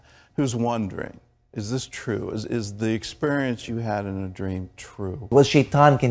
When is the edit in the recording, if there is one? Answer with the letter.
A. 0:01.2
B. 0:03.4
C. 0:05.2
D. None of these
C